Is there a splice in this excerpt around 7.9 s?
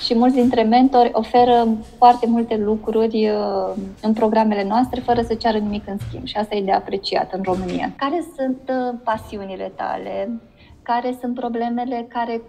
yes; 1 cut; at 7.9 s

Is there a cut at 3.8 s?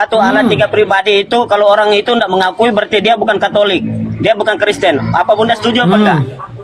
no; 0 cuts

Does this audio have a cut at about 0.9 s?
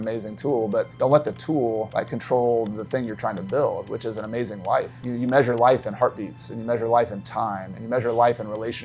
yes; 3 cuts; at 0.9 s, 1.9 s, 5.0 s

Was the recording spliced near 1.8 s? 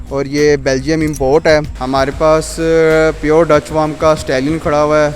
yes; 1 cut; at 1.8 s

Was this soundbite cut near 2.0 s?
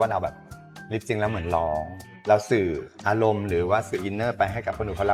yes; 1 cut; at 2.0 s

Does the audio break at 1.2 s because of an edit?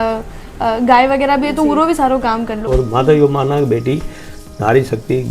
no; 1 cut; at 2.7 s

